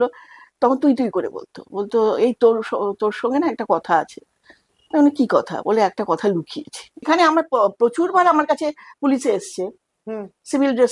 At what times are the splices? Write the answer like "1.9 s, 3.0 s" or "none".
6.9 s

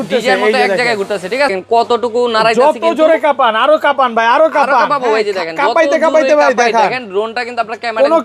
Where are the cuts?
1.5 s

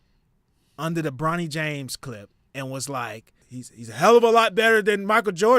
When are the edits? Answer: 3.4 s

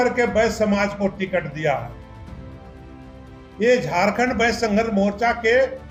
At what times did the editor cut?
none

